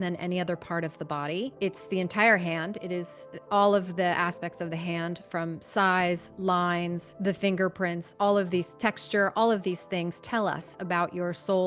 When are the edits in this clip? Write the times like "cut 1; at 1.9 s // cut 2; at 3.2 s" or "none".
cut 1; at 1.5 s // cut 2; at 7.1 s